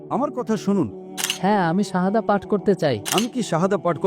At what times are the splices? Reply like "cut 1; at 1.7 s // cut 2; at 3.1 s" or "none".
cut 1; at 1.1 s // cut 2; at 3.0 s